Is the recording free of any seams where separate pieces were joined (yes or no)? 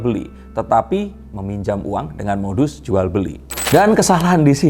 no